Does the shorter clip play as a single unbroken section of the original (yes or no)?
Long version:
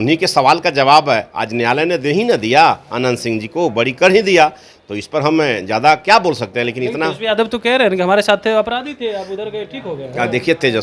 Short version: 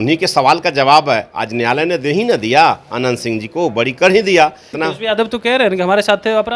no